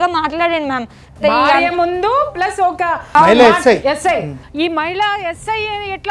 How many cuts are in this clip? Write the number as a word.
two